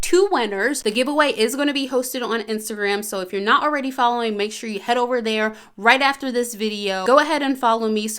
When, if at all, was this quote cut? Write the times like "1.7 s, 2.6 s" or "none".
0.8 s, 7.0 s